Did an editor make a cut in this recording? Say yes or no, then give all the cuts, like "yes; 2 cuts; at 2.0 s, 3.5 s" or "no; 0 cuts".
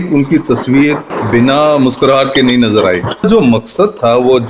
yes; 2 cuts; at 1.1 s, 3.2 s